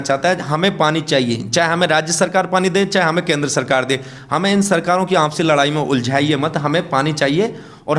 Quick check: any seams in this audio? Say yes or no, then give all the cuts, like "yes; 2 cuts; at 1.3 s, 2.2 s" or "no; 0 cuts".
no; 0 cuts